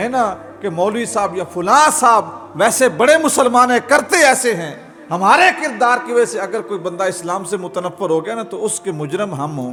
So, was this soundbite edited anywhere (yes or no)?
no